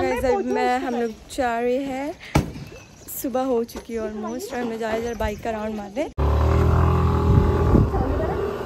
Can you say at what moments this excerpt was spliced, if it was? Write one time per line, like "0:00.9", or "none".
0:06.1